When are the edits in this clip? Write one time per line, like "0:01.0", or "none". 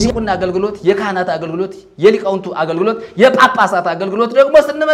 none